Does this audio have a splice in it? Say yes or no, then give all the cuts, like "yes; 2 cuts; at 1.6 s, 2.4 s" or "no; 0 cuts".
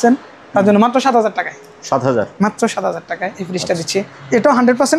no; 0 cuts